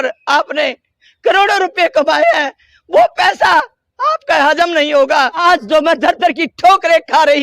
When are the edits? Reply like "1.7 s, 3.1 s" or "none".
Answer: 5.4 s